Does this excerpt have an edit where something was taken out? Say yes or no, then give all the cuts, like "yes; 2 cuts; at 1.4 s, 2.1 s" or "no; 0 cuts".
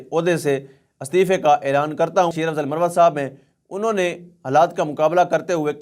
yes; 1 cut; at 2.3 s